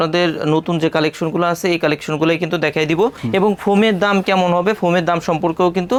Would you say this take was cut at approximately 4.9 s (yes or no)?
no